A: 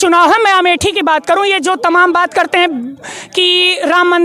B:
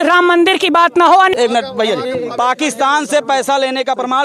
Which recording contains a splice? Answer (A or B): B